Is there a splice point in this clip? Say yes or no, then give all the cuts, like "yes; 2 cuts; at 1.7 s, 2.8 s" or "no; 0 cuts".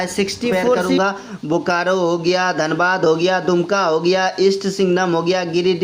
yes; 1 cut; at 1.0 s